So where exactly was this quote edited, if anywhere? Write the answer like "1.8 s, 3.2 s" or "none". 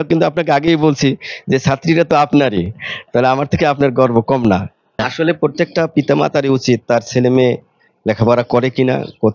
4.9 s